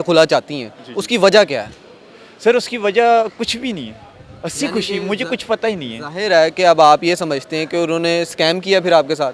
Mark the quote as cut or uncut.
uncut